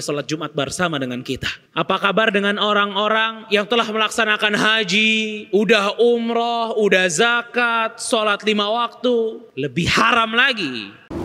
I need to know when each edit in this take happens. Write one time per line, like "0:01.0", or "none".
0:01.6
0:09.5